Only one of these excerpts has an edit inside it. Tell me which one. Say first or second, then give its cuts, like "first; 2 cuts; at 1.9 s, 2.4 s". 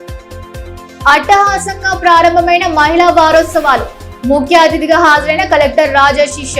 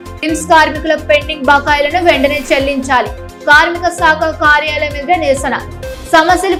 first; 1 cut; at 0.9 s